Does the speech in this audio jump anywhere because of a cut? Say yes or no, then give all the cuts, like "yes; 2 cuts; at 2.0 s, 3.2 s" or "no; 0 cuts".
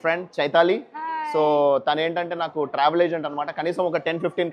no; 0 cuts